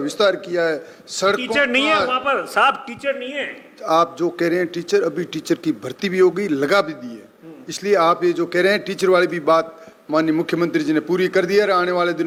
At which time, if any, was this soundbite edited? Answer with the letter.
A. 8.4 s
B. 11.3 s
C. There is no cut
C